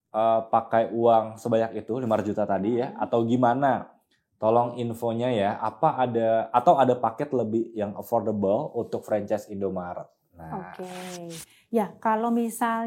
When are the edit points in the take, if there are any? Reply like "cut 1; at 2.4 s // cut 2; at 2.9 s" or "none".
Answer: none